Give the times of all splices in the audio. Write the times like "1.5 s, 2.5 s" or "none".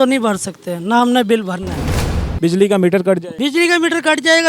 2.1 s, 3.3 s